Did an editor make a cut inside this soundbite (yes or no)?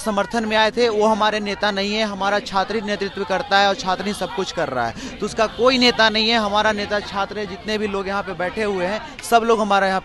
no